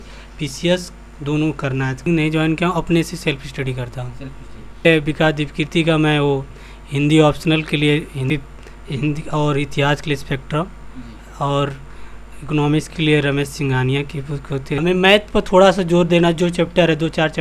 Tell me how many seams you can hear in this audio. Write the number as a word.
four